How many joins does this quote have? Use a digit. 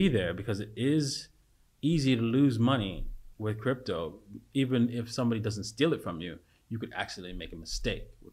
0